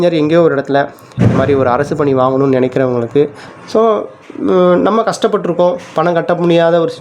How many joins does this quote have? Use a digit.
1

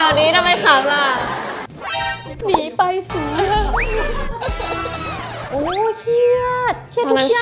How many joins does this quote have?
1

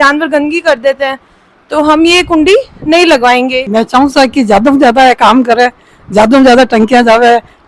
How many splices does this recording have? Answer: 1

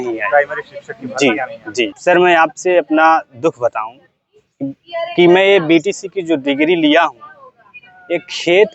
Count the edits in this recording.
1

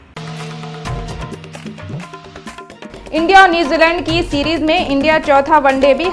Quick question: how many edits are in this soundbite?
1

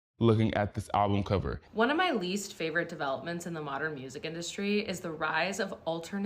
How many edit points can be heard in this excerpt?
1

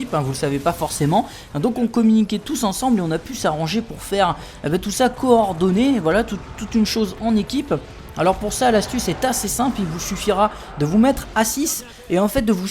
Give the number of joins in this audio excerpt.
1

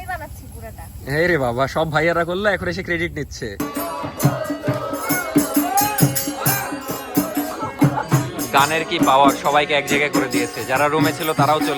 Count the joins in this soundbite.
2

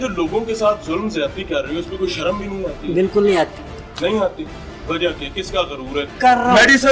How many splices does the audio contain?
1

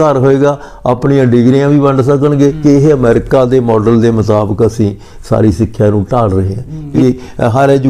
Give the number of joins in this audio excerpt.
2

